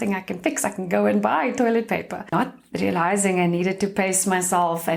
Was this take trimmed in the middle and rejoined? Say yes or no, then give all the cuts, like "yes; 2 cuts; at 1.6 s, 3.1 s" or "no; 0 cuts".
yes; 1 cut; at 2.2 s